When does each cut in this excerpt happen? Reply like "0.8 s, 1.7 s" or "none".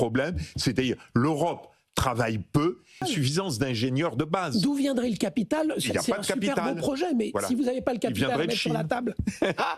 3.0 s